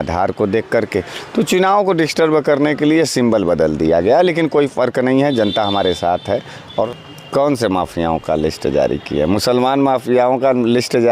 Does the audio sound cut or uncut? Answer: cut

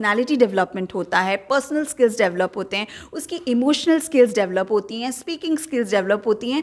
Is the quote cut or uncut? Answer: uncut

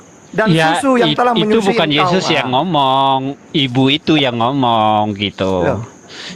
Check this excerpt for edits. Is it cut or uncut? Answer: uncut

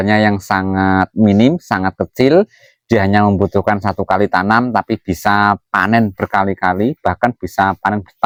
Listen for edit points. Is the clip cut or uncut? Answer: uncut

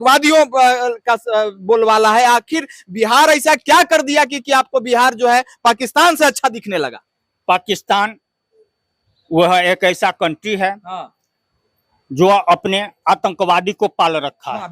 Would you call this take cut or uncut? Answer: uncut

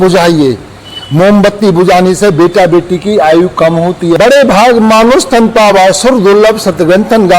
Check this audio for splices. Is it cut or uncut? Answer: cut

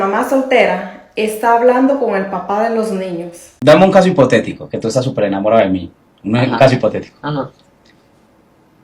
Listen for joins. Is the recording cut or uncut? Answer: cut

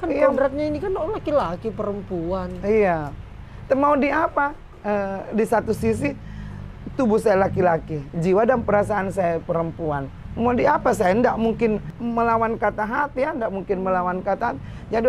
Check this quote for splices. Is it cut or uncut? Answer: uncut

